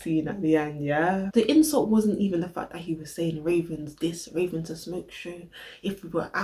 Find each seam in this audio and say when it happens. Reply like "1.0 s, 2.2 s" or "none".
1.3 s